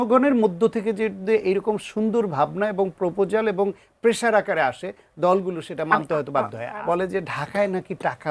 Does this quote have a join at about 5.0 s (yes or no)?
no